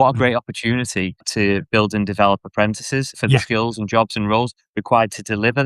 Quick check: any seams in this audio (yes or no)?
yes